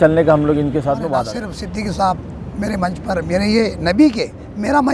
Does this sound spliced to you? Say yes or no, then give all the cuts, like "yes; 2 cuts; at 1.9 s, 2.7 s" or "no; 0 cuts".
yes; 1 cut; at 1.3 s